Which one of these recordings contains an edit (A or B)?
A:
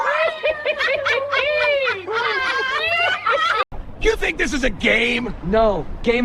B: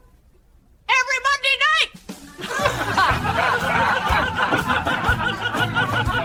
A